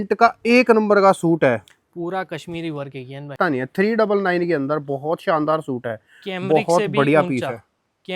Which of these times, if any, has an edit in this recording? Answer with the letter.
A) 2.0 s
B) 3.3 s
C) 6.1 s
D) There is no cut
B